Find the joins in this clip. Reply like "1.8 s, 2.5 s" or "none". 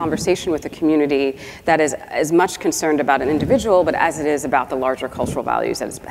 none